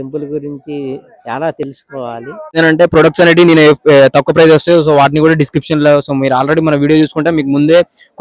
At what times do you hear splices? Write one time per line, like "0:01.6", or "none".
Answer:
0:02.6